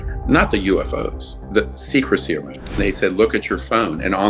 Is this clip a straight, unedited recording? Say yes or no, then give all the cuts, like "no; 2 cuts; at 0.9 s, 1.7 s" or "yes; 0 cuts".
no; 2 cuts; at 1.4 s, 2.6 s